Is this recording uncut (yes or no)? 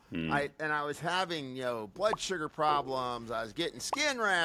yes